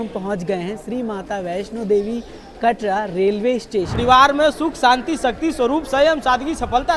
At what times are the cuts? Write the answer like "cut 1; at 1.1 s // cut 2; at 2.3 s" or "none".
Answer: cut 1; at 4.0 s